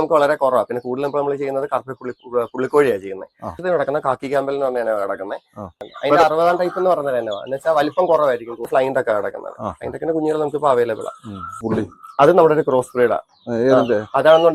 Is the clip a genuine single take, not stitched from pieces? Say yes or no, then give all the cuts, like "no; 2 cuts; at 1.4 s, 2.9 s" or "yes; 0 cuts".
no; 4 cuts; at 3.6 s, 5.8 s, 8.7 s, 11.5 s